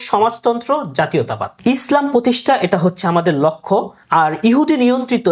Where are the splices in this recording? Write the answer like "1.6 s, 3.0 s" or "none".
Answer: 1.4 s, 4.0 s

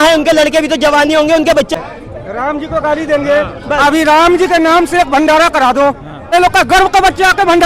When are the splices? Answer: 1.7 s, 6.3 s

